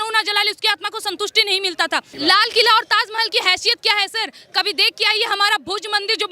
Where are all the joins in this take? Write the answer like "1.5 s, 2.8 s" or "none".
2.1 s